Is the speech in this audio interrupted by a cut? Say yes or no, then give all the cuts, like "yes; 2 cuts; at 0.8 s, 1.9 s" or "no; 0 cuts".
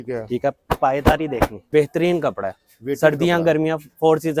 yes; 1 cut; at 1.7 s